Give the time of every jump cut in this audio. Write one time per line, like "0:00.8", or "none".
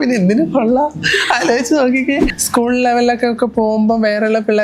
0:02.3

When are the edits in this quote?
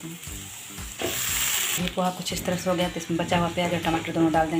none

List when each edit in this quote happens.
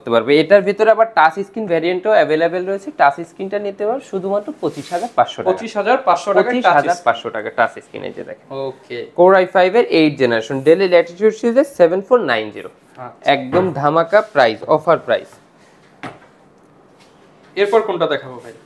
none

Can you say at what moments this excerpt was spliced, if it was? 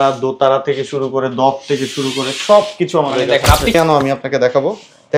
0:03.7

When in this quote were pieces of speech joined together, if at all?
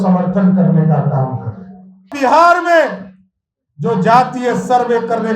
0:02.1

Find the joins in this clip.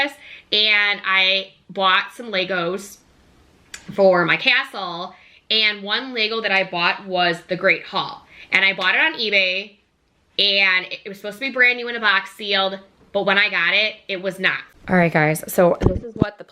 0:14.6

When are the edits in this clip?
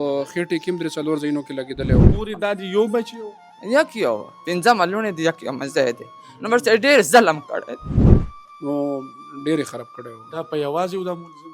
0:02.1
0:08.2

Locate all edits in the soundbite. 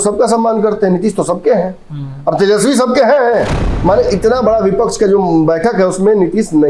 0:03.6

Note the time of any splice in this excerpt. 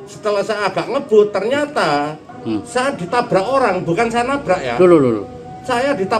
0:02.2

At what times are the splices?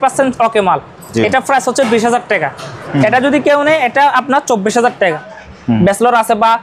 0:02.7
0:05.3

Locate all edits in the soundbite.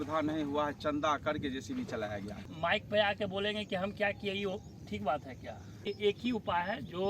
0:02.5
0:05.9

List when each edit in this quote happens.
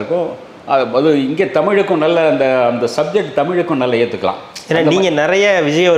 none

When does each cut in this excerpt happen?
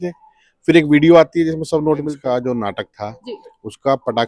0:02.2

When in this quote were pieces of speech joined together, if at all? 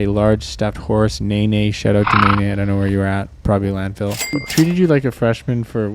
0:04.3

